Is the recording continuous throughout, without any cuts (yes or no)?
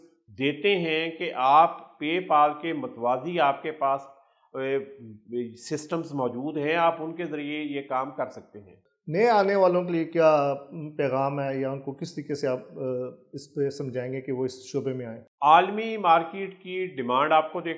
yes